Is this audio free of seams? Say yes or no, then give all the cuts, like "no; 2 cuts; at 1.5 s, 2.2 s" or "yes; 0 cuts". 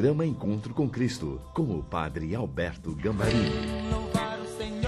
no; 1 cut; at 3.5 s